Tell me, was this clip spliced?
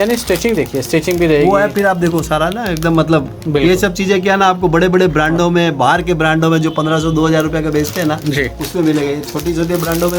no; 0 cuts

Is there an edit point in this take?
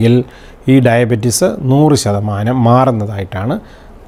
no; 0 cuts

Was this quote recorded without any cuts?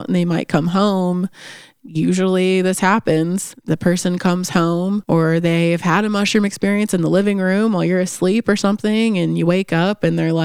no; 2 cuts; at 3.5 s, 5.0 s

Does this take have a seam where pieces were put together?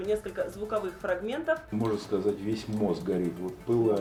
no; 0 cuts

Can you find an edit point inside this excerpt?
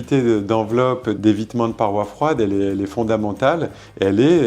yes; 1 cut; at 1.2 s

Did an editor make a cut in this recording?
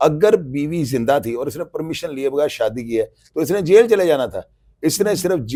no; 0 cuts

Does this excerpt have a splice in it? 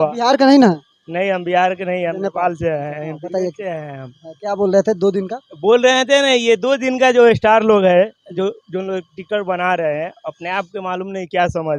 no; 0 cuts

